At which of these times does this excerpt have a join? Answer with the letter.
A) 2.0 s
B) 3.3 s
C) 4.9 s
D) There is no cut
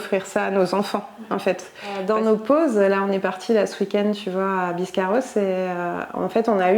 A